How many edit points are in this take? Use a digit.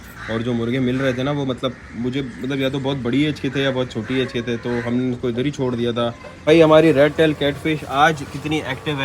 1